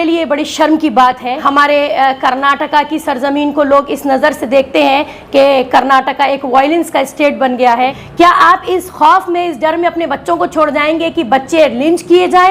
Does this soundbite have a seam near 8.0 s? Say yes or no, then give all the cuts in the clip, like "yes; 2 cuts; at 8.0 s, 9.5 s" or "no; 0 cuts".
yes; 2 cuts; at 1.4 s, 8.0 s